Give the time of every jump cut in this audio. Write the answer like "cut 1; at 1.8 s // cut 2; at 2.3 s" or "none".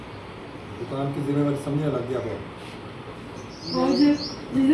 cut 1; at 3.5 s